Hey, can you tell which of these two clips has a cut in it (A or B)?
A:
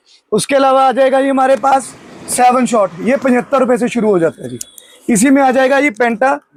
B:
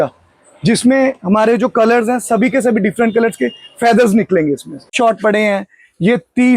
B